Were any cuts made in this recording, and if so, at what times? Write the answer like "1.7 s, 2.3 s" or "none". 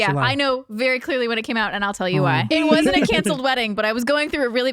2.5 s